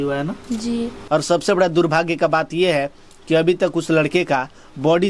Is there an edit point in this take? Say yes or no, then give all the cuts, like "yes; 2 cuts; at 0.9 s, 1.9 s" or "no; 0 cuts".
yes; 1 cut; at 1.0 s